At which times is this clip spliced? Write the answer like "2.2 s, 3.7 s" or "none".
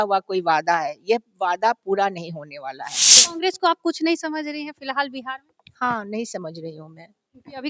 3.2 s